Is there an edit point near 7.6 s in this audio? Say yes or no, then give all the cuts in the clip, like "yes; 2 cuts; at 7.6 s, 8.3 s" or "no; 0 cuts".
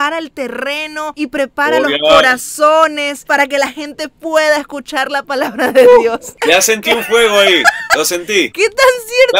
no; 2 cuts; at 1.1 s, 6.3 s